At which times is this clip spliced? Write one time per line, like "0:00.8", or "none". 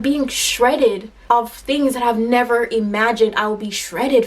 0:01.1

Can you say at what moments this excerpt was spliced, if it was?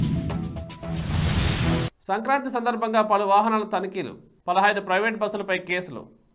none

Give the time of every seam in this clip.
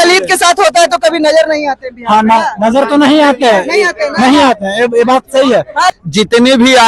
0:05.9

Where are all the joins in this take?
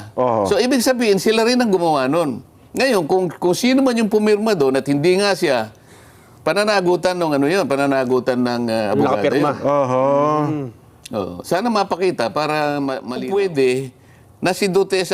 0:13.2

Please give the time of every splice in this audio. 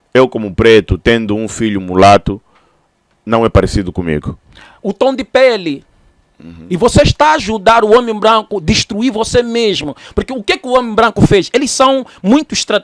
none

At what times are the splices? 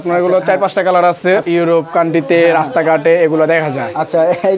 0:01.4

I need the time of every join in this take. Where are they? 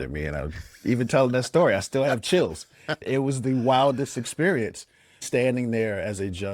0:03.0
0:05.2

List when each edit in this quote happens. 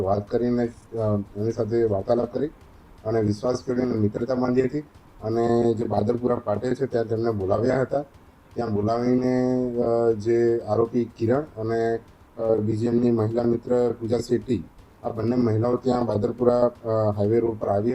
none

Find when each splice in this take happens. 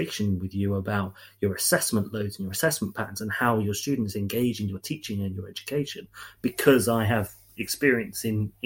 none

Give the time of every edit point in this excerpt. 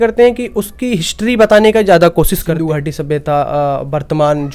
0:02.5

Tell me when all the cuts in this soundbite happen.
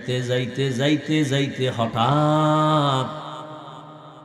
none

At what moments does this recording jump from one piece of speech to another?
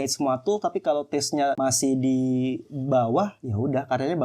0:01.6

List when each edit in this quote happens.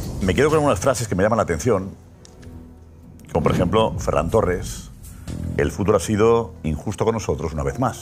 0:05.7

